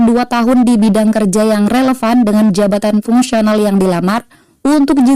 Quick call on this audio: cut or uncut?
uncut